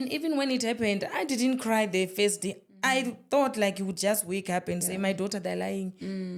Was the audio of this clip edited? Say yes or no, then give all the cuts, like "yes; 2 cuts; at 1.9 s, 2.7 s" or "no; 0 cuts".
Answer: no; 0 cuts